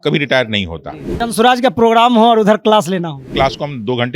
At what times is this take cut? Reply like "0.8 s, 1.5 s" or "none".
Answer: 1.1 s, 3.3 s